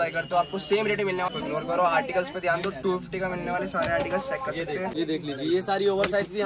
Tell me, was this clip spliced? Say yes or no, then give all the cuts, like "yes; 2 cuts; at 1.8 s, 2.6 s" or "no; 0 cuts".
yes; 2 cuts; at 1.3 s, 4.9 s